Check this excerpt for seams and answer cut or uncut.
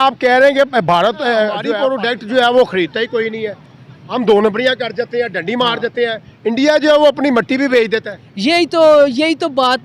cut